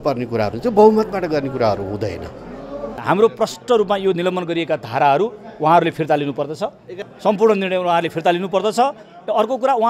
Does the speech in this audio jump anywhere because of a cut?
yes; 2 cuts; at 3.0 s, 6.9 s

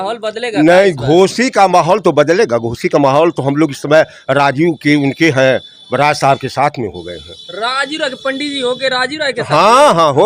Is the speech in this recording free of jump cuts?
yes; 0 cuts

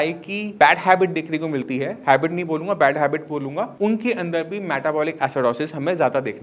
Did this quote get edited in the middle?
no; 0 cuts

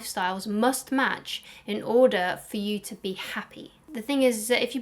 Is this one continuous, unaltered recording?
no; 1 cut; at 3.8 s

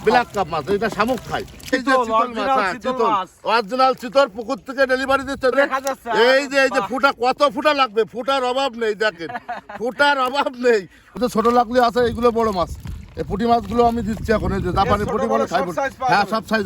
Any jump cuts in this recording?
yes; 3 cuts; at 1.7 s, 5.5 s, 11.2 s

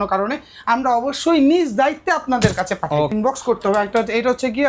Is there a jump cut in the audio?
yes; 1 cut; at 3.1 s

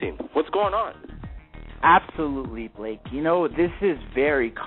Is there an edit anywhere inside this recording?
yes; 1 cut; at 1.7 s

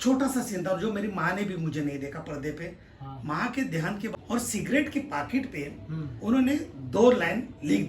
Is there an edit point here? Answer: yes; 1 cut; at 4.1 s

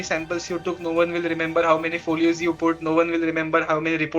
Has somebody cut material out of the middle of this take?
no; 0 cuts

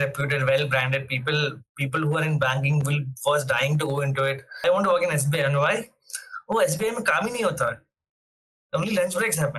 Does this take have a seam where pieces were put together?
yes; 1 cut; at 4.6 s

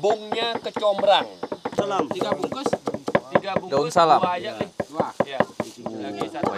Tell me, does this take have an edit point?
yes; 1 cut; at 1.8 s

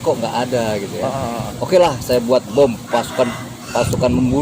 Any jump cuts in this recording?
yes; 1 cut; at 1.5 s

